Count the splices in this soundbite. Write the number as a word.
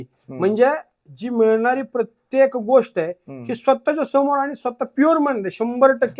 zero